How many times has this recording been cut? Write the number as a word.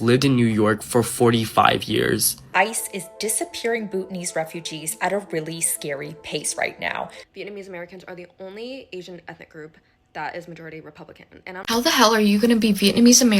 three